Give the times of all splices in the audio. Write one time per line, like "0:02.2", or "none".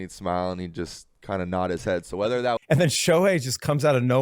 0:02.6